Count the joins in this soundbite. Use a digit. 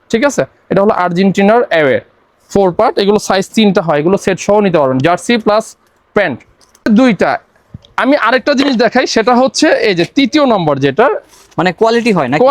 1